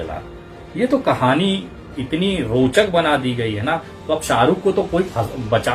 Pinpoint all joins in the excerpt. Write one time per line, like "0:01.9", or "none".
none